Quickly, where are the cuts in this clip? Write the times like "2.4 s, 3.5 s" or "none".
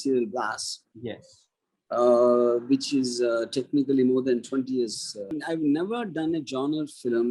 5.3 s